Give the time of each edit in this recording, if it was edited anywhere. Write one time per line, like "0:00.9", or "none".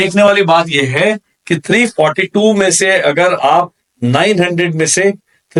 none

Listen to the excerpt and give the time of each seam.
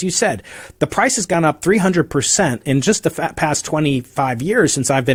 none

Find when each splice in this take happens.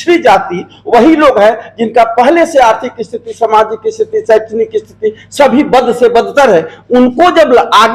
none

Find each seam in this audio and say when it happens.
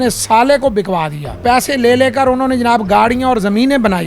0:01.4

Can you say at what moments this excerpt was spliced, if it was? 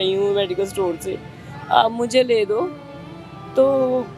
none

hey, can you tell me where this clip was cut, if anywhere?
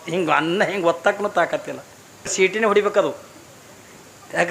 0:02.3

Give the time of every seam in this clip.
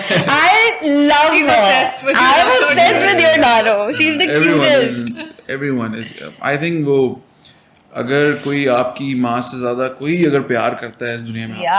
none

